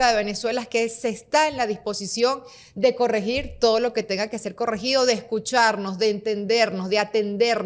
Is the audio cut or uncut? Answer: uncut